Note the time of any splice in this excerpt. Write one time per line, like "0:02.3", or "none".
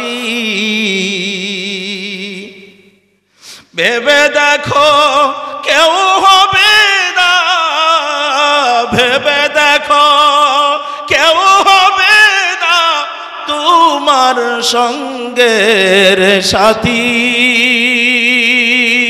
none